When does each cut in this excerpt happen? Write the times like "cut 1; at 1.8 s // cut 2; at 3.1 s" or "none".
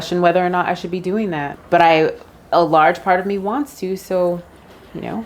cut 1; at 1.5 s